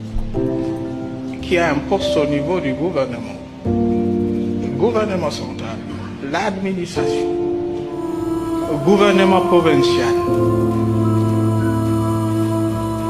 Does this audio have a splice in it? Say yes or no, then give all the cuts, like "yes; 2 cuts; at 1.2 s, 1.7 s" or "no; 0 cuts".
no; 0 cuts